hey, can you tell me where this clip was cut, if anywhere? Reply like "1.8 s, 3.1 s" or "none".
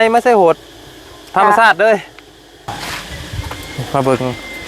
2.7 s